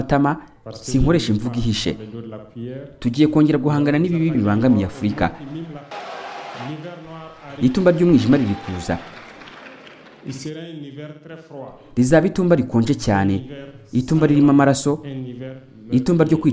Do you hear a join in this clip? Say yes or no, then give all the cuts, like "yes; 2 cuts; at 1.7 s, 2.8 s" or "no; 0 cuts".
yes; 2 cuts; at 5.9 s, 11.8 s